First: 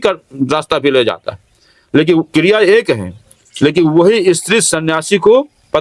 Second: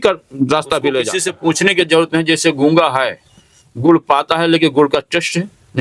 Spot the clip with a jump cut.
second; 1 cut; at 1.2 s

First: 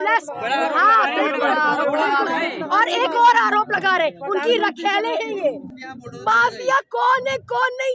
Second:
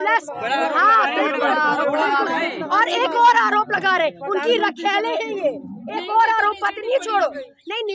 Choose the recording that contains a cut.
first; 1 cut; at 5.7 s

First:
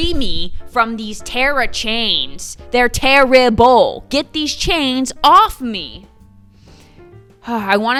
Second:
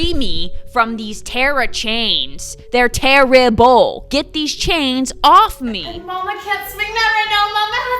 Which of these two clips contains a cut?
second; 1 cut; at 5.9 s

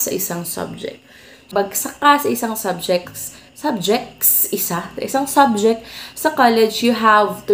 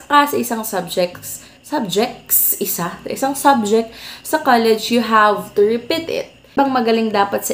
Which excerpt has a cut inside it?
second; 1 cut; at 6.5 s

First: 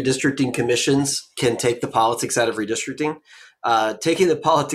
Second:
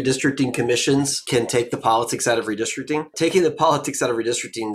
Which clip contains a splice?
second; 2 cuts; at 1.2 s, 3.1 s

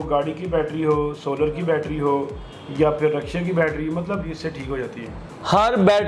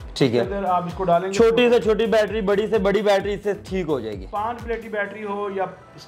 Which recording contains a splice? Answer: first; 1 cut; at 4.3 s

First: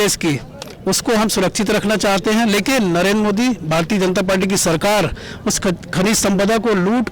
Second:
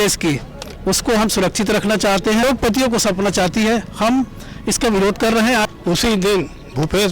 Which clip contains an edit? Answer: second; 2 cuts; at 2.4 s, 5.7 s

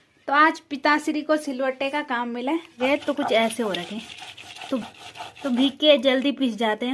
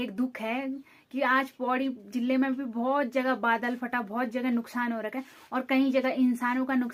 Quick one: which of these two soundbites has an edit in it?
first; 1 cut; at 2.8 s

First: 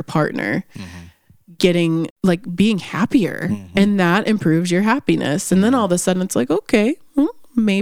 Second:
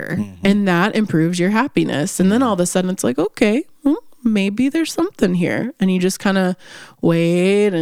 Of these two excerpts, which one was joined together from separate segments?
first; 1 cut; at 2.1 s

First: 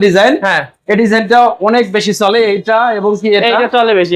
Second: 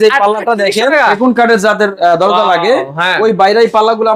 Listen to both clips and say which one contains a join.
second; 1 cut; at 1.2 s

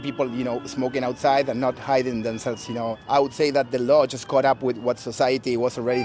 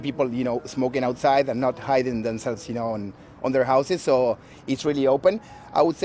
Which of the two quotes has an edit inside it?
first; 1 cut; at 3.0 s

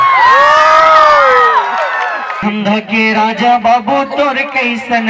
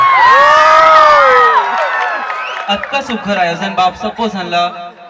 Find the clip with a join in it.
first; 1 cut; at 2.4 s

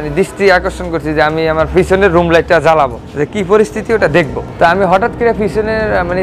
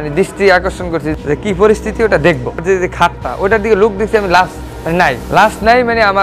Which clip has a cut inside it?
second; 2 cuts; at 1.1 s, 2.6 s

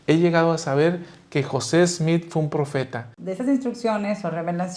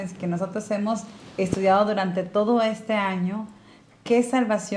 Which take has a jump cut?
first; 1 cut; at 3.2 s

